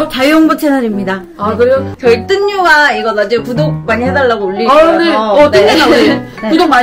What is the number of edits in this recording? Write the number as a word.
one